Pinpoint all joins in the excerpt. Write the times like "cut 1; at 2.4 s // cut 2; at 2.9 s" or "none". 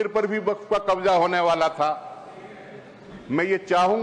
none